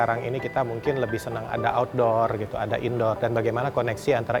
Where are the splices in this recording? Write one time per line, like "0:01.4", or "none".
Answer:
none